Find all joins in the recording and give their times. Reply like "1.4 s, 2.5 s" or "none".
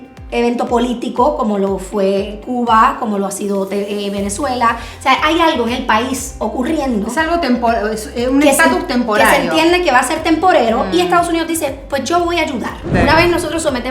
12.8 s